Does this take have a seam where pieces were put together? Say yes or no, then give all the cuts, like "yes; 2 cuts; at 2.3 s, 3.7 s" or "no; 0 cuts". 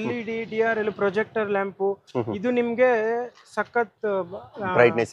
no; 0 cuts